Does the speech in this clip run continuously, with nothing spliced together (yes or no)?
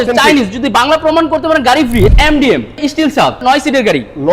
no